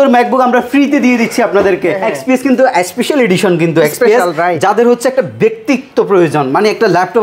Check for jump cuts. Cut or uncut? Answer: cut